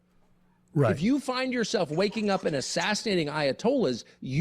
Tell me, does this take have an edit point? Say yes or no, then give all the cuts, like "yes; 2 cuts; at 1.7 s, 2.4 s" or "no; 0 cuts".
no; 0 cuts